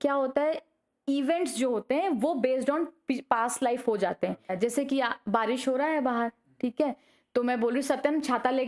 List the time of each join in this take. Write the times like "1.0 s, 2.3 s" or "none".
4.5 s